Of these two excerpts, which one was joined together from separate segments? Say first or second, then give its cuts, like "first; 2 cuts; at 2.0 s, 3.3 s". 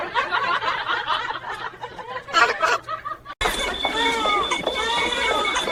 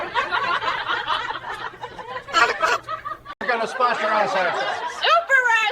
second; 1 cut; at 3.4 s